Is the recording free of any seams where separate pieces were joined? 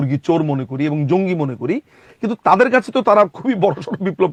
yes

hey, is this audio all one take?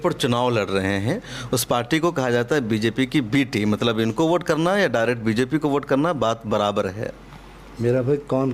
yes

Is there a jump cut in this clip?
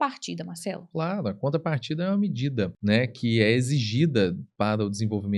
yes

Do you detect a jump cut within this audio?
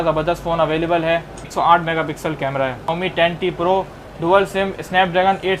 yes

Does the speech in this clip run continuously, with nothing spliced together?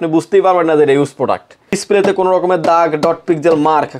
no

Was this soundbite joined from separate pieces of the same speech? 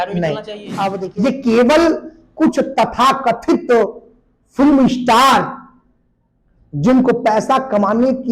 yes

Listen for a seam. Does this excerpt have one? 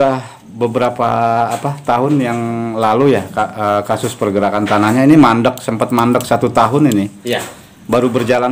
no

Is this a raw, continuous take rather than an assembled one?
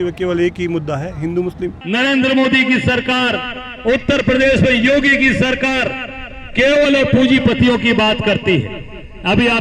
no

